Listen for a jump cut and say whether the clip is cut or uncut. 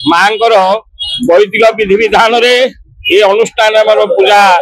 uncut